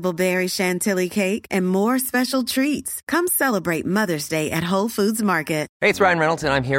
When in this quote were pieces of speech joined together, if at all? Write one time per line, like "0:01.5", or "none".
0:05.7